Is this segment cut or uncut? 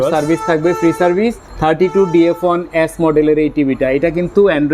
uncut